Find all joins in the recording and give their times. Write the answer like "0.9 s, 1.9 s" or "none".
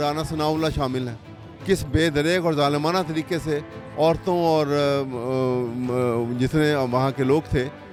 none